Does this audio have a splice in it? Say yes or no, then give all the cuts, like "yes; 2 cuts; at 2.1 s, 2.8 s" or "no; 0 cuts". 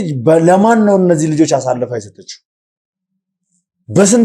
no; 0 cuts